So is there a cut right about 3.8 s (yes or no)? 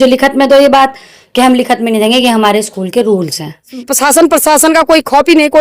yes